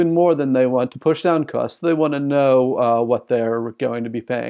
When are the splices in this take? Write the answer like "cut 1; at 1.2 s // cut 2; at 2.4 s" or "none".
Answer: cut 1; at 0.9 s